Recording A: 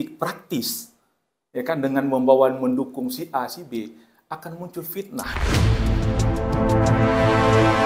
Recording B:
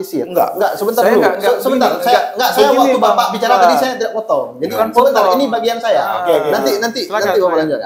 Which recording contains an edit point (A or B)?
A